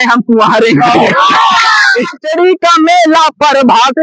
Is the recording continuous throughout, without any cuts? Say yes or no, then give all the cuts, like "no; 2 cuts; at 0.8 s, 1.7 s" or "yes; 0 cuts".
no; 1 cut; at 2.2 s